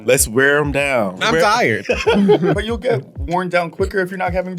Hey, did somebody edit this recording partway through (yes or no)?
yes